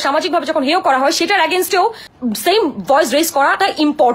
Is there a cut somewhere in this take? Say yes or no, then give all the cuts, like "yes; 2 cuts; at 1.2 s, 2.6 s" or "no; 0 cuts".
yes; 1 cut; at 2.1 s